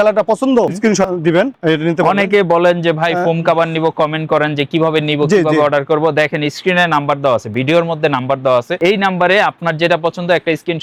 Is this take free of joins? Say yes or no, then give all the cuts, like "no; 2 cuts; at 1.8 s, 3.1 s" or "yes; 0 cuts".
yes; 0 cuts